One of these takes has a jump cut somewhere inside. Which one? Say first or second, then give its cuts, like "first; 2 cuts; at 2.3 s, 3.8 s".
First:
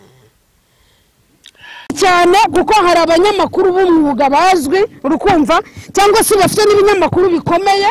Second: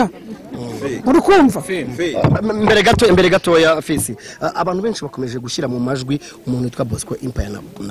first; 1 cut; at 2.0 s